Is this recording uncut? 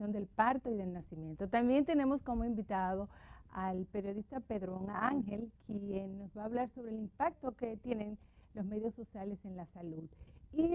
yes; 0 cuts

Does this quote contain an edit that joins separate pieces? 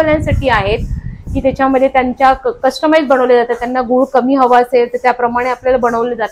no; 0 cuts

